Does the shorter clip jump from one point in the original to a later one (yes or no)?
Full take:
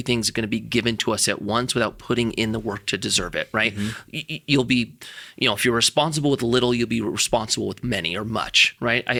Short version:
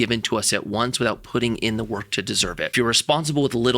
yes